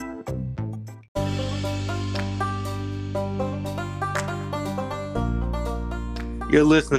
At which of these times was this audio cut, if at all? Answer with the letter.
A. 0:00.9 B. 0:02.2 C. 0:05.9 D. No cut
A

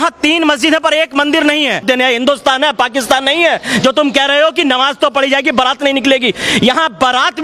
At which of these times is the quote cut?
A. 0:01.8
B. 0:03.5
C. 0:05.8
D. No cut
A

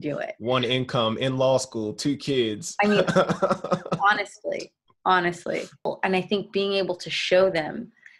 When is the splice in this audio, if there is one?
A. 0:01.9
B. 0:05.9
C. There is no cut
B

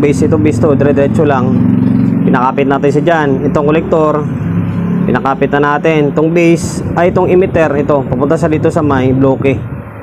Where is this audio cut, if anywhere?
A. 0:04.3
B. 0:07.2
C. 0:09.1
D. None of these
D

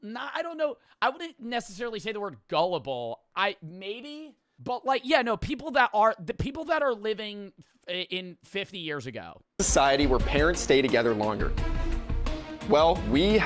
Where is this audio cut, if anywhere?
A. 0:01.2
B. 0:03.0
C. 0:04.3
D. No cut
B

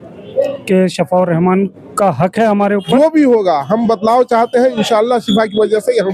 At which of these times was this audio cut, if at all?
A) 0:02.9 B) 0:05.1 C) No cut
A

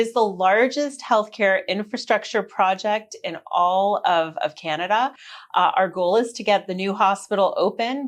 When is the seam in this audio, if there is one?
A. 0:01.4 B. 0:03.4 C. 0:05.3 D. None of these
D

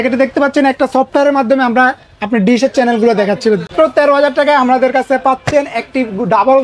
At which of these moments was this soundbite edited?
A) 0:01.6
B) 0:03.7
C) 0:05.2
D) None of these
B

